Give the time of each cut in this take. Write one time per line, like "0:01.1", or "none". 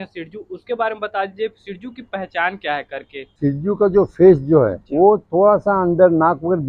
0:03.3
0:04.8